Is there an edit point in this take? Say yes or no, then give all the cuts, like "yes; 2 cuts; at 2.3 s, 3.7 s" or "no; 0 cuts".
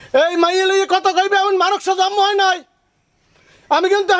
no; 0 cuts